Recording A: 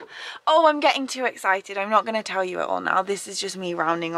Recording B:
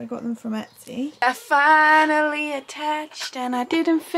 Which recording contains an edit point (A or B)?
B